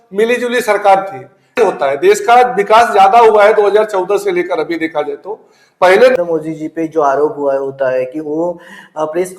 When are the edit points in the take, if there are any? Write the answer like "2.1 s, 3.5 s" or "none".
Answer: 1.5 s, 6.2 s